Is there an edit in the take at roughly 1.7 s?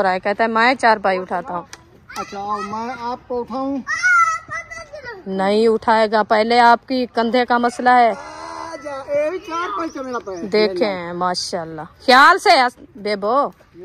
yes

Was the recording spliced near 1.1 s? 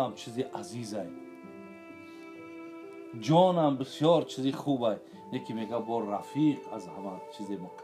yes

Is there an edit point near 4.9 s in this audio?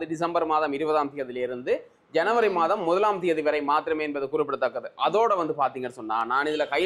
no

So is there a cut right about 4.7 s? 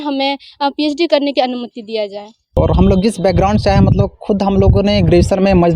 no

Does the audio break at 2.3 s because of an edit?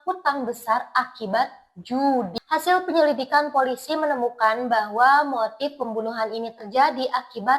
yes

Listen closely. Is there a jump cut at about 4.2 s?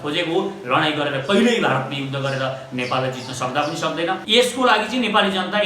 yes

